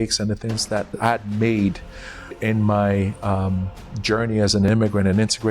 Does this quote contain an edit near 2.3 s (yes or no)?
yes